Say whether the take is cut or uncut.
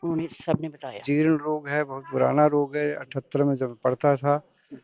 cut